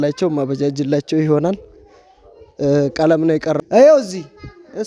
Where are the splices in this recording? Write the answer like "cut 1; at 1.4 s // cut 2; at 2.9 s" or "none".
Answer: cut 1; at 3.6 s